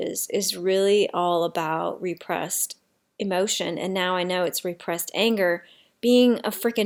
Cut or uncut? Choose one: uncut